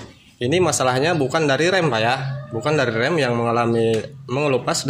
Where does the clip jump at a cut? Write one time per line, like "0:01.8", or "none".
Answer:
none